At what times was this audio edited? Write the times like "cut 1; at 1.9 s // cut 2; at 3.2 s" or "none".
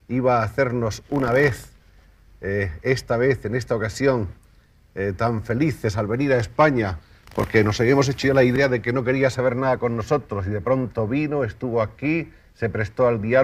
cut 1; at 11.3 s